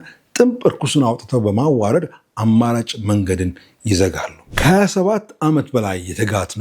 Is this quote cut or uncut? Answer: cut